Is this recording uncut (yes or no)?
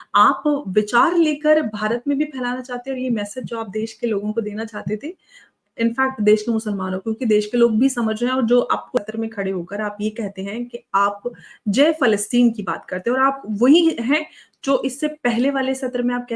no